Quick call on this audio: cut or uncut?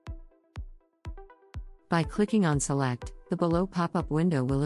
cut